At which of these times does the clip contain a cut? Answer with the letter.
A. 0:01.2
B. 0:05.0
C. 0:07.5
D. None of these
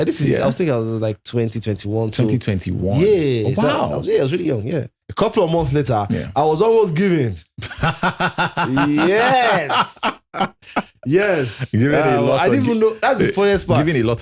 B